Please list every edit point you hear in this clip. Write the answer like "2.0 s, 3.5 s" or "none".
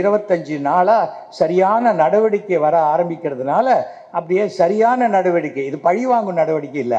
none